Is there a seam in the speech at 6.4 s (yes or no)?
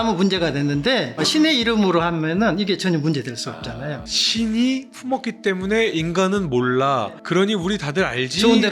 no